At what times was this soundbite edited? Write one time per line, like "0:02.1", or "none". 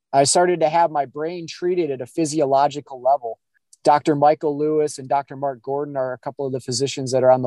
none